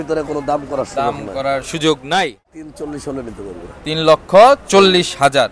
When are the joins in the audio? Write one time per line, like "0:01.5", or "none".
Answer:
0:02.6